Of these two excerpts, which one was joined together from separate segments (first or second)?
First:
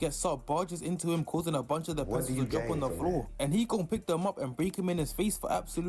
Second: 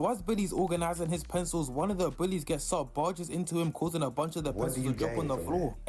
first